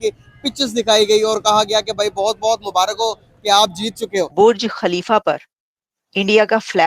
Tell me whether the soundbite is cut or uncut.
cut